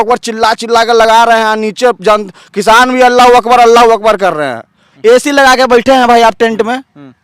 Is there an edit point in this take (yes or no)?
yes